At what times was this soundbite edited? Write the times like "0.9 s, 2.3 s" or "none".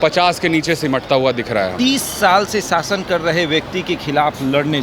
1.7 s